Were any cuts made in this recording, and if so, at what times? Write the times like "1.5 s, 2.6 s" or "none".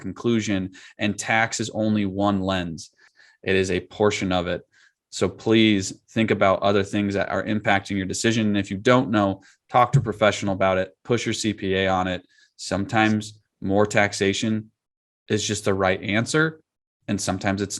3.1 s